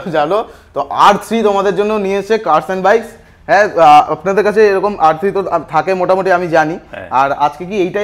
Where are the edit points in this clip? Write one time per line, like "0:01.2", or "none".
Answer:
none